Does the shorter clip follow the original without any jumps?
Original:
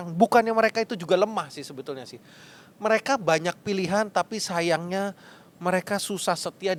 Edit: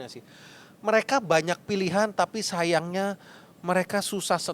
yes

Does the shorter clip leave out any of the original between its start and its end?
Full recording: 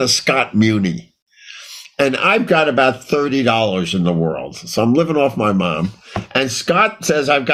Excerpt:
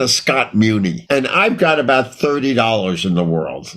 yes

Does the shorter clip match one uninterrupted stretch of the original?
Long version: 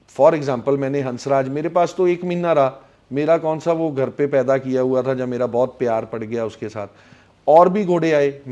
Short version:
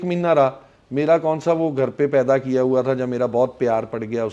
yes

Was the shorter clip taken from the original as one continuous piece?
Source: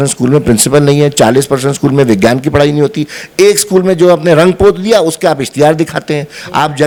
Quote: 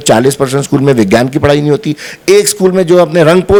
yes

